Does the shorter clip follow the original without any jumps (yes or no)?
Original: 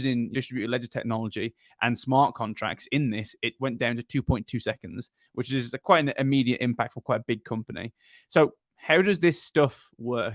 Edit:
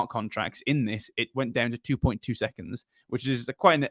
yes